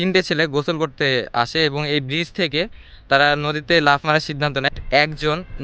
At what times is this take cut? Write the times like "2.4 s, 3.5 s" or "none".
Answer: 4.6 s